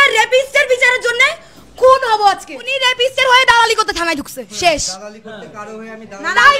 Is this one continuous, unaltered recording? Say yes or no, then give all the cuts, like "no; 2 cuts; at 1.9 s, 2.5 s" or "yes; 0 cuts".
no; 1 cut; at 2.8 s